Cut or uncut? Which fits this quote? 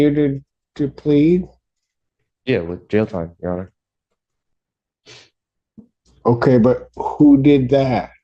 uncut